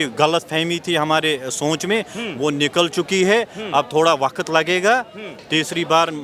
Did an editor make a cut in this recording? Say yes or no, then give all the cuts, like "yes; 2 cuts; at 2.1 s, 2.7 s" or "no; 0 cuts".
no; 0 cuts